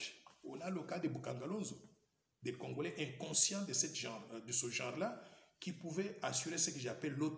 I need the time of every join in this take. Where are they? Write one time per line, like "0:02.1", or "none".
none